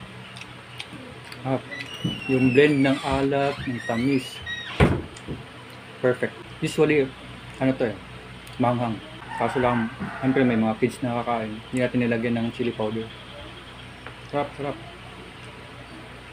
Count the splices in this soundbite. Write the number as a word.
two